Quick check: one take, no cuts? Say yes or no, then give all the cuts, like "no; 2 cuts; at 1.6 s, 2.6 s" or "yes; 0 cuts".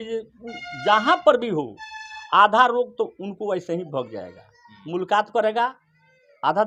yes; 0 cuts